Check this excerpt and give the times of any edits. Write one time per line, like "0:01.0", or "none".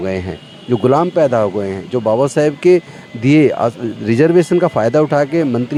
none